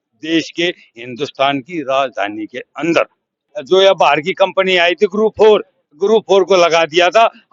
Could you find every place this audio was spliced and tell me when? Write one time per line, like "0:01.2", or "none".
0:03.5

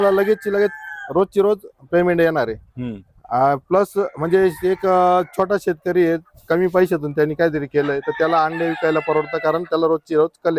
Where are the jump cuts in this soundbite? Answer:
none

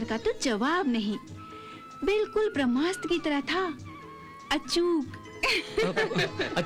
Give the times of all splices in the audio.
none

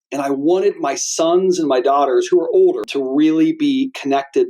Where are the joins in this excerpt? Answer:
0:02.8

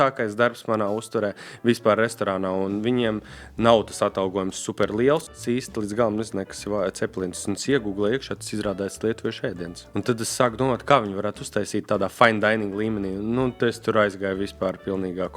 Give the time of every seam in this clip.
0:05.4
0:09.7

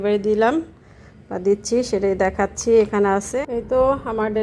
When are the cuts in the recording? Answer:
0:03.3

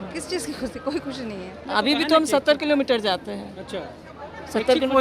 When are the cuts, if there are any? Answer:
0:01.5

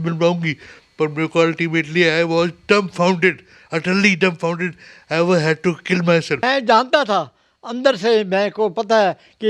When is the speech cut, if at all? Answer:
0:06.4

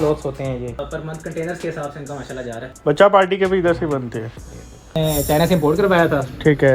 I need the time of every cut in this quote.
0:00.8
0:02.6
0:05.0

